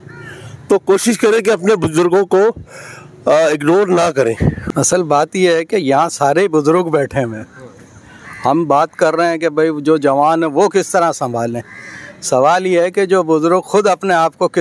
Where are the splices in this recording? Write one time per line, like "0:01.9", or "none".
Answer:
0:04.6